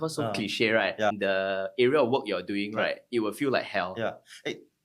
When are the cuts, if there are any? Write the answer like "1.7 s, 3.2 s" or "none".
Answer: 1.1 s